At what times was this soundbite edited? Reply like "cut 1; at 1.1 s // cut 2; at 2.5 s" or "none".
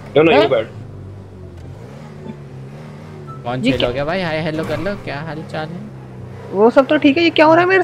none